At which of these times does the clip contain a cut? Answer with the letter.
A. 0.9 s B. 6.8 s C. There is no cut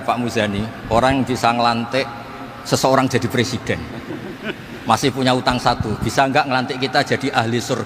C